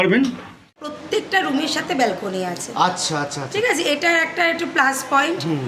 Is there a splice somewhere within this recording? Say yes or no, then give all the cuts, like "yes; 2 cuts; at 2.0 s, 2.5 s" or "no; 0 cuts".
yes; 1 cut; at 1.0 s